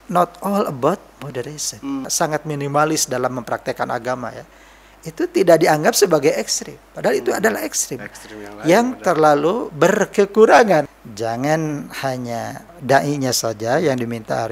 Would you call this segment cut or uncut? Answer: cut